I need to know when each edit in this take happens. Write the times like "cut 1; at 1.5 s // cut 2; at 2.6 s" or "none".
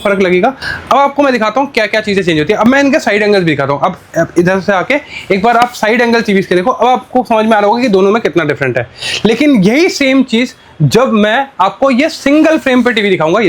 none